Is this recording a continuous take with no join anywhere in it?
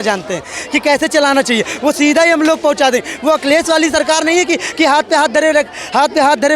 yes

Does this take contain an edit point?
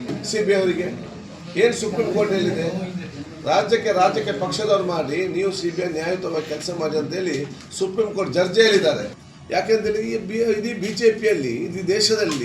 yes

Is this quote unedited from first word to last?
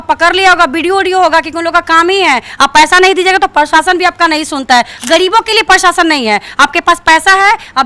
yes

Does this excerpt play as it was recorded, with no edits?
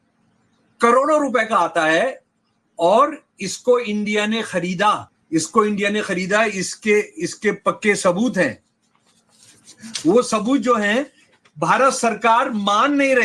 no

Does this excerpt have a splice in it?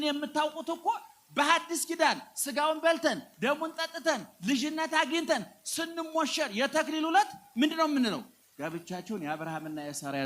yes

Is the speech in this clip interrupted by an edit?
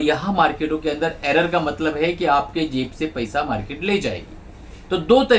no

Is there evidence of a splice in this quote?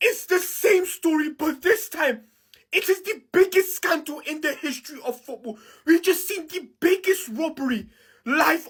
no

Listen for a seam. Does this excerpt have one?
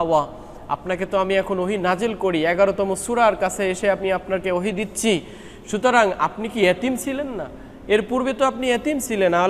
no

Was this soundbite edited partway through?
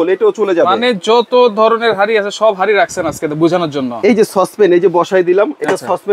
yes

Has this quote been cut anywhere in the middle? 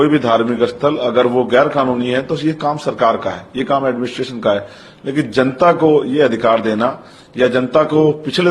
no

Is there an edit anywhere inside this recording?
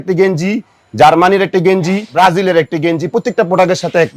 yes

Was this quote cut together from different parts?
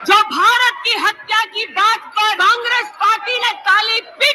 yes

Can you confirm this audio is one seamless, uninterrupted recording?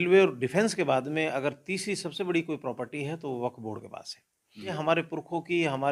no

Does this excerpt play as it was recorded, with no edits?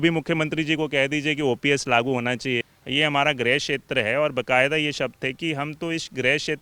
no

